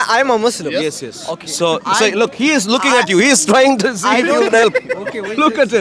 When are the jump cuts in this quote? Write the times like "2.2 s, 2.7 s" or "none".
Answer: none

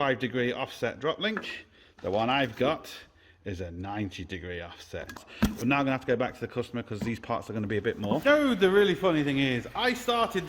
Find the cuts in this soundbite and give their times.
5.3 s, 8.2 s

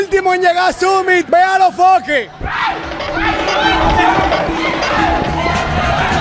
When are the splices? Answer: none

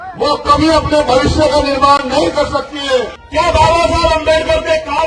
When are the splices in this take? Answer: 3.2 s

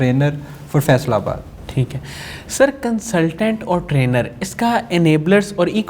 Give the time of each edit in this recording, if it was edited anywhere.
none

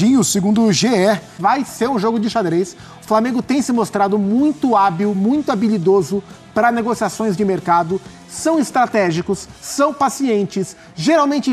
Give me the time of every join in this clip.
1.4 s

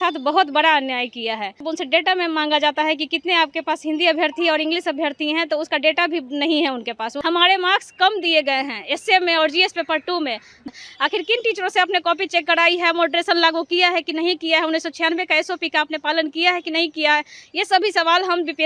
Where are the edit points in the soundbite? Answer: 1.7 s, 7.1 s, 10.6 s

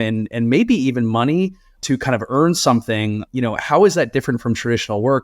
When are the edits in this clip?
1.7 s, 3.2 s

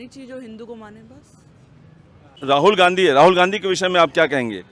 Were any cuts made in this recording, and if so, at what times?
2.4 s

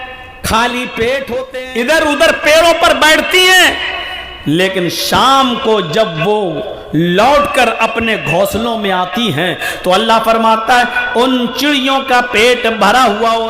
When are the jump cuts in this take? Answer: 1.5 s

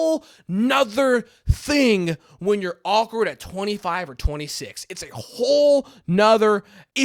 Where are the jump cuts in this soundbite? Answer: none

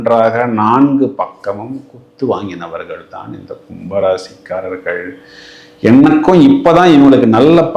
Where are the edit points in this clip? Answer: none

